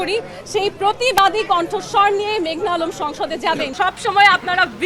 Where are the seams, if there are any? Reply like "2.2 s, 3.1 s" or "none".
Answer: 3.7 s